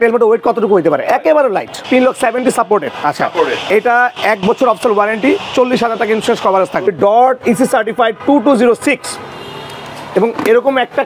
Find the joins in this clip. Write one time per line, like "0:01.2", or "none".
0:01.8
0:06.9